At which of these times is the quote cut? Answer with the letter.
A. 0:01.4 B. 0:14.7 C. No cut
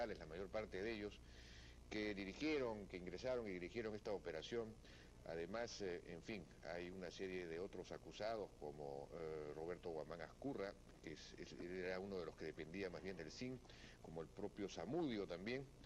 A